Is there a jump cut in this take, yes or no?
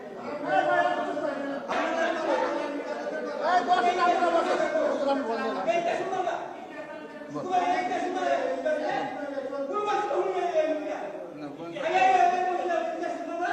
yes